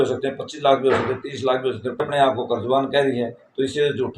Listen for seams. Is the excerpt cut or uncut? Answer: cut